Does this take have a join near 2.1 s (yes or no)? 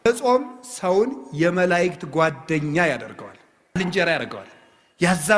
no